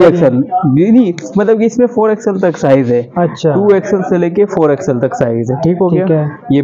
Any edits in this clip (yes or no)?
no